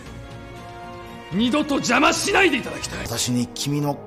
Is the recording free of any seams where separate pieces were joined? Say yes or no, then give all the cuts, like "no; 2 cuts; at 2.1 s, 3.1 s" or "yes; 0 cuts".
no; 1 cut; at 3.0 s